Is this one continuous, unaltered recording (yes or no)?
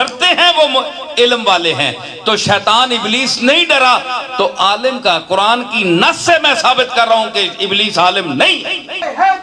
yes